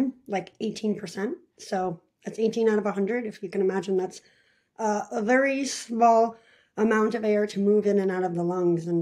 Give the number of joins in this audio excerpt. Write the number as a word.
zero